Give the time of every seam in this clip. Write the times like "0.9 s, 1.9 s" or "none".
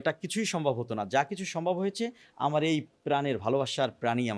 none

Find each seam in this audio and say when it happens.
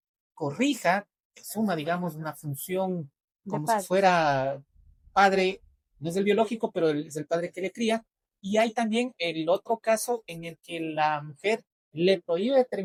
none

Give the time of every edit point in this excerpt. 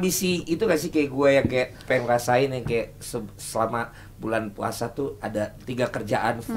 1.8 s, 5.6 s

